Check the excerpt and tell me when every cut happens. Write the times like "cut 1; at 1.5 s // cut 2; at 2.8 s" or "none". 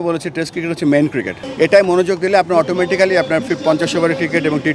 cut 1; at 1.4 s

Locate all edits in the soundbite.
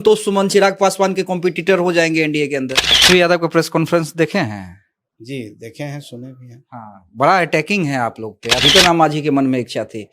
cut 1; at 3.0 s // cut 2; at 8.6 s

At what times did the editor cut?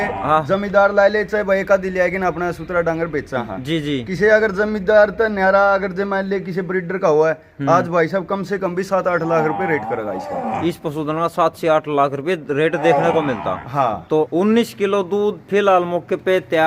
cut 1; at 14.3 s

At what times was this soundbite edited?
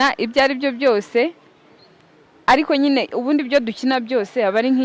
none

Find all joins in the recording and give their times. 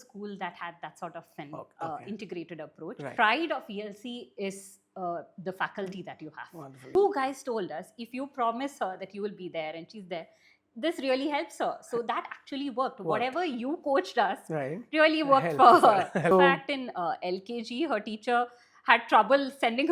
cut 1; at 3.1 s // cut 2; at 6.9 s // cut 3; at 16.3 s

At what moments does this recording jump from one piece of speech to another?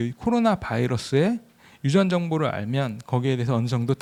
none

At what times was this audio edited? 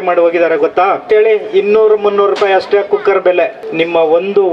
cut 1; at 1.0 s // cut 2; at 3.6 s

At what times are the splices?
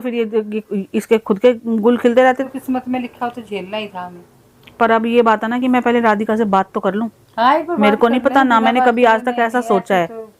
cut 1; at 2.3 s

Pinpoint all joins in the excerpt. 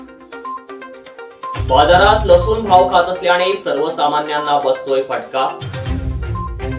none

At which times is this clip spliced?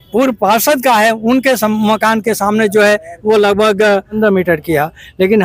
cut 1; at 4.2 s

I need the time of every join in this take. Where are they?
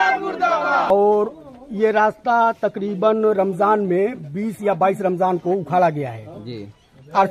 cut 1; at 0.9 s

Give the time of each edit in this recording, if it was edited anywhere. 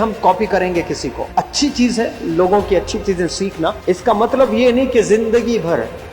cut 1; at 1.2 s // cut 2; at 3.8 s

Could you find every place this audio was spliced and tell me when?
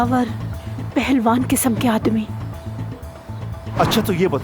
none

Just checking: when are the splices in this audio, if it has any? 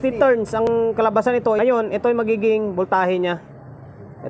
cut 1; at 0.7 s // cut 2; at 1.6 s

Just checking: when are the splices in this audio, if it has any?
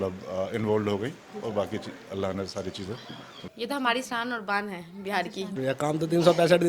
cut 1; at 3.4 s // cut 2; at 5.5 s

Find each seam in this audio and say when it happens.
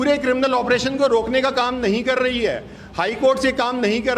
none

